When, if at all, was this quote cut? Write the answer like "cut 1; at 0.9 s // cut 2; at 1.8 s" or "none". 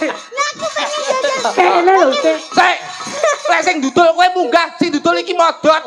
none